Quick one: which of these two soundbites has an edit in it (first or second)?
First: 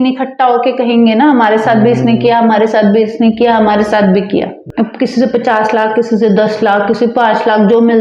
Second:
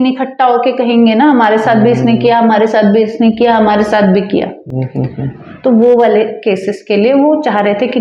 first